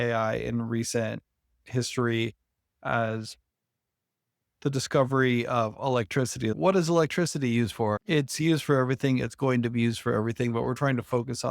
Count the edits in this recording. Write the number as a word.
zero